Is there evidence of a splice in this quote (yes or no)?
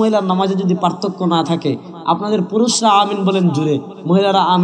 no